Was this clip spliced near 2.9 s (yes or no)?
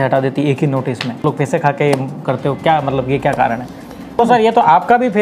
no